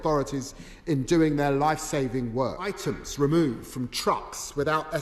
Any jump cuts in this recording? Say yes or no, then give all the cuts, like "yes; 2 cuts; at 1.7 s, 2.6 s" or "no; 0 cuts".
yes; 1 cut; at 2.8 s